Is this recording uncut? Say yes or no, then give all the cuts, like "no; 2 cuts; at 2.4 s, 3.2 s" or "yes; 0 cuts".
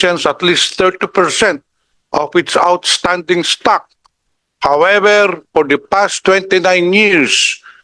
yes; 0 cuts